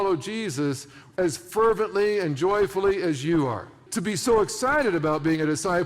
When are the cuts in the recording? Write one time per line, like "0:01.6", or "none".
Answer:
0:03.8